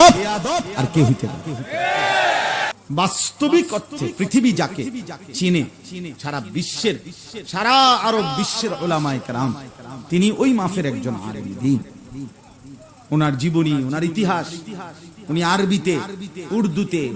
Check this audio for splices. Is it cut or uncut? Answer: cut